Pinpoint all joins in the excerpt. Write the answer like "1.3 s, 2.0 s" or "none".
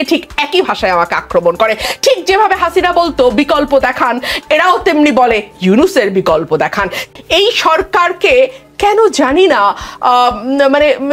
7.0 s